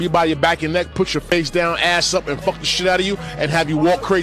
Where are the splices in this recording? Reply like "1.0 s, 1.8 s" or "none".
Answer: none